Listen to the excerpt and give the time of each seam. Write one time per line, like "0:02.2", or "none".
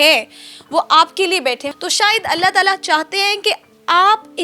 0:01.7

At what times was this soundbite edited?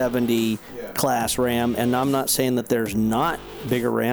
none

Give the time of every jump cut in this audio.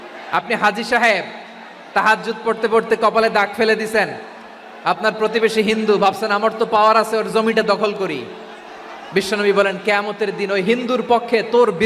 none

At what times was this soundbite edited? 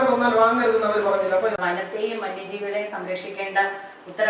0:01.6

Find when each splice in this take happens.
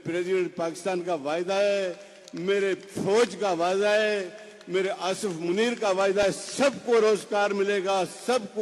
none

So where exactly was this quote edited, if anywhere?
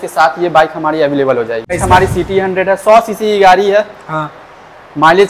0:01.8

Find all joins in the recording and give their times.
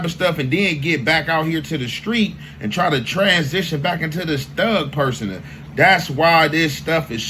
0:06.2

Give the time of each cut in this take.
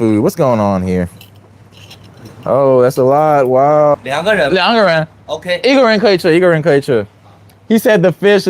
0:03.9

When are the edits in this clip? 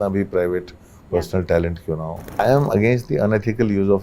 0:02.4

